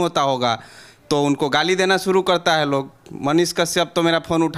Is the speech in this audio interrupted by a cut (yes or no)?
no